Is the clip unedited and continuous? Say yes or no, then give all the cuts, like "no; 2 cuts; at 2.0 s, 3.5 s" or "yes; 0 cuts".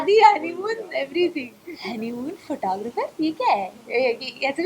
no; 1 cut; at 1.6 s